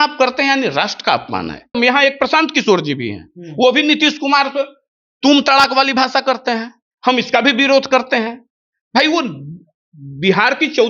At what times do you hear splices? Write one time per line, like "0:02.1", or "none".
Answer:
0:01.8